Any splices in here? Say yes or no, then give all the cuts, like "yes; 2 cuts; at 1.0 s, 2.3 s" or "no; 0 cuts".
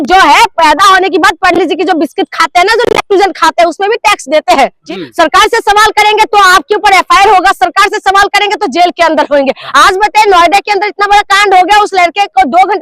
yes; 1 cut; at 4.8 s